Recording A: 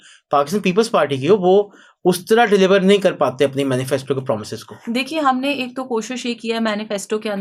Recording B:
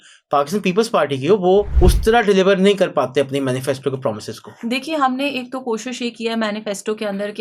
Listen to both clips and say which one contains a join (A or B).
B